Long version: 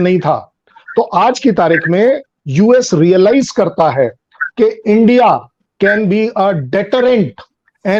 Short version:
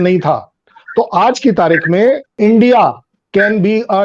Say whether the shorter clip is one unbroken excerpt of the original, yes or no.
no